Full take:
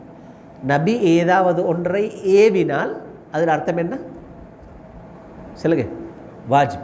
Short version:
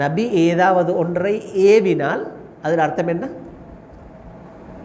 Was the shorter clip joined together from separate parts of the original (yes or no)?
no